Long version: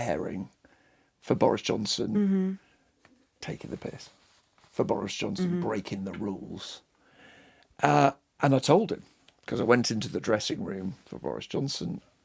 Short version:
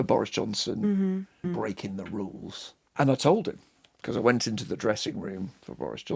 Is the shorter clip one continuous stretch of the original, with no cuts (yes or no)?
no